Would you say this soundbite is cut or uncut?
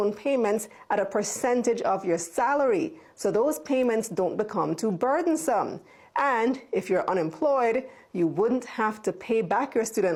uncut